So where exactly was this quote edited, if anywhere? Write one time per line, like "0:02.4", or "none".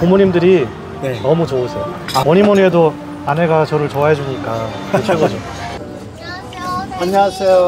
0:02.2
0:05.6

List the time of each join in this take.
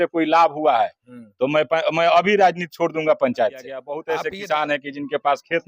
0:03.9

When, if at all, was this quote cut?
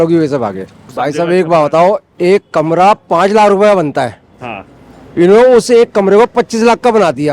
0:00.9

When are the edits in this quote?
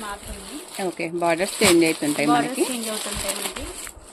none

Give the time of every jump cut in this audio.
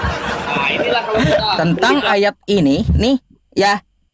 0:01.6

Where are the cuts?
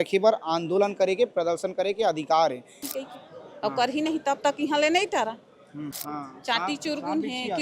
0:02.8
0:05.9

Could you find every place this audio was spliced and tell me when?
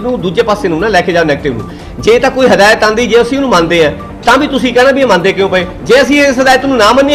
none

